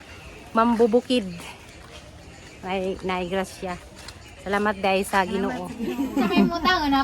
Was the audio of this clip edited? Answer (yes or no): yes